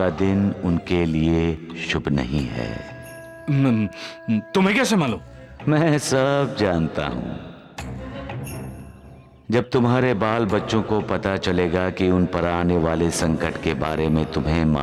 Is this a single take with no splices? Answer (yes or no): yes